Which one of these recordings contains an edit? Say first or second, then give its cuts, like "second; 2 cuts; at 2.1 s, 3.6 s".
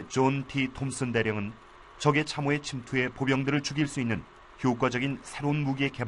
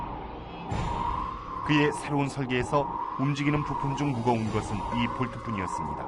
second; 1 cut; at 2.4 s